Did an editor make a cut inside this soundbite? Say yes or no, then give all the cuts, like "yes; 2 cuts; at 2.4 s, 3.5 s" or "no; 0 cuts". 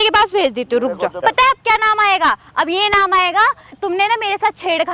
yes; 2 cuts; at 1.2 s, 3.8 s